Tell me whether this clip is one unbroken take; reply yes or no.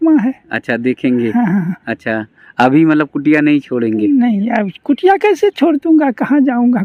yes